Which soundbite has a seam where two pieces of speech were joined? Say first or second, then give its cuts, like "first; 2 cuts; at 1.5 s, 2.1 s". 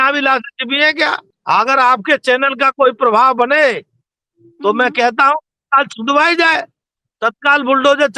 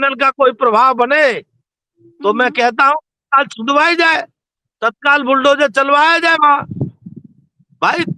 first; 1 cut; at 1.3 s